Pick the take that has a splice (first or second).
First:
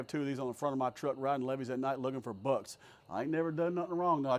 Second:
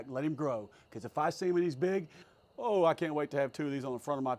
second